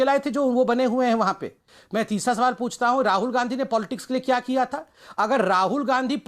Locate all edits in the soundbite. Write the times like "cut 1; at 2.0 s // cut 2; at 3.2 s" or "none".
cut 1; at 1.8 s